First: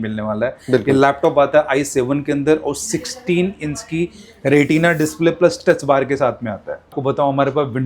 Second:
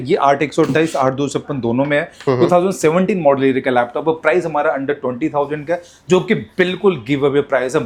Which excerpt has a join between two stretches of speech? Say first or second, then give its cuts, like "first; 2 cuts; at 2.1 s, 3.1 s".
first; 1 cut; at 6.9 s